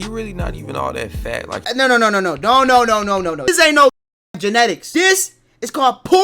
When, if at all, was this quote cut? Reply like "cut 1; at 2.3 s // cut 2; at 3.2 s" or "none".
cut 1; at 1.6 s // cut 2; at 3.5 s // cut 3; at 4.8 s